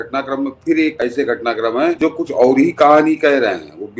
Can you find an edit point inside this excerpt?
yes; 2 cuts; at 1.0 s, 2.0 s

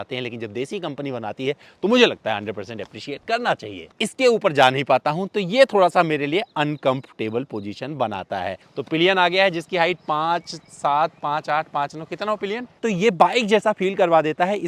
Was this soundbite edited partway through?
yes; 3 cuts; at 3.8 s, 8.6 s, 12.8 s

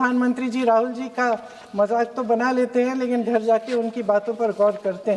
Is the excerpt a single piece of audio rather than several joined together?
yes; 0 cuts

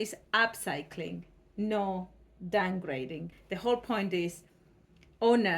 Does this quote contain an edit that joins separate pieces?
yes; 1 cut; at 3.2 s

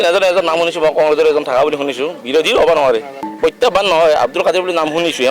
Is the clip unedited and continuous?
no; 1 cut; at 3.2 s

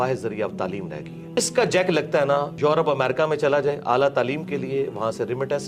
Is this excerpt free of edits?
no; 2 cuts; at 1.4 s, 2.5 s

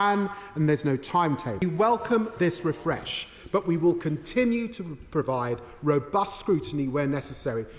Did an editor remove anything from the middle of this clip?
yes; 1 cut; at 1.6 s

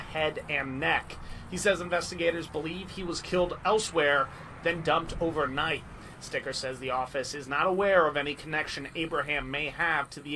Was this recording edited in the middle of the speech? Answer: no; 0 cuts

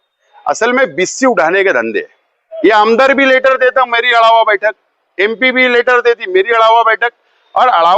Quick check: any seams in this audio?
yes; 1 cut; at 2.4 s

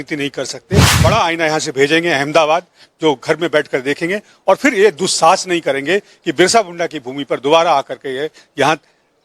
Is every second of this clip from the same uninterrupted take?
no; 1 cut; at 0.9 s

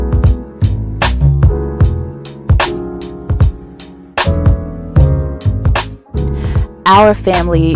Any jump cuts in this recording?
no; 0 cuts

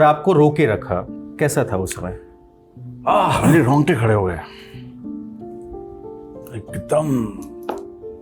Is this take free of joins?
no; 1 cut; at 1.1 s

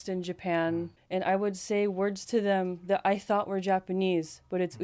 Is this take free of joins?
no; 1 cut; at 1.0 s

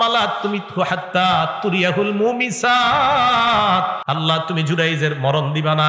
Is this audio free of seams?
no; 1 cut; at 4.0 s

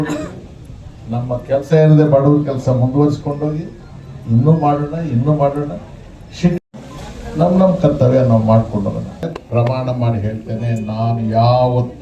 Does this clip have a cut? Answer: yes; 1 cut; at 9.1 s

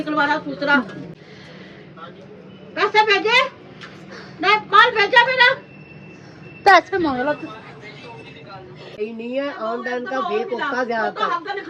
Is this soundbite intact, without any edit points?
no; 2 cuts; at 1.2 s, 8.9 s

